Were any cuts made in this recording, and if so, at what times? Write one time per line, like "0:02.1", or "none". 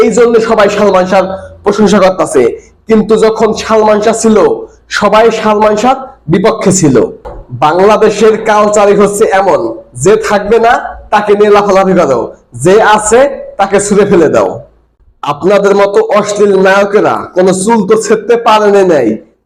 none